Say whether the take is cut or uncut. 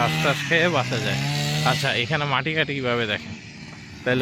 uncut